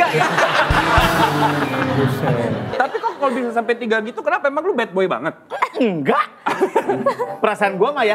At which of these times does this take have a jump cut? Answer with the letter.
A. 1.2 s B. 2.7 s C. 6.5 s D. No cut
B